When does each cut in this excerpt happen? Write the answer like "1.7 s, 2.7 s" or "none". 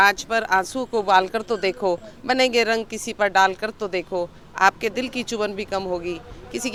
none